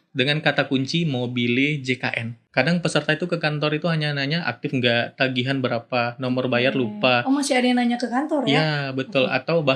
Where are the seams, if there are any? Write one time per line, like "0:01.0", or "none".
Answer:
0:02.3